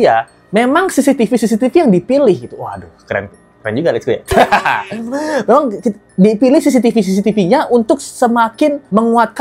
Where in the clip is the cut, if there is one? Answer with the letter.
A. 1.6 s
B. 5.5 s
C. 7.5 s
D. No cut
D